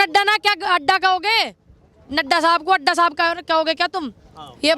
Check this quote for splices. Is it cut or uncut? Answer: uncut